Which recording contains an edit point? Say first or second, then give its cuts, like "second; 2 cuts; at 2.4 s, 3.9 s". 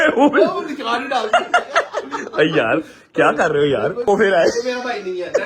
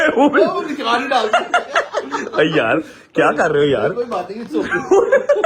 first; 1 cut; at 4.0 s